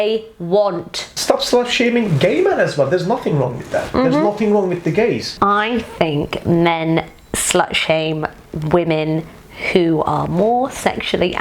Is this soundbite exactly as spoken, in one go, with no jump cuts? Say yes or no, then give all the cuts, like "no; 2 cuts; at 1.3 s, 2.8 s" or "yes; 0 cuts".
no; 2 cuts; at 1.1 s, 5.3 s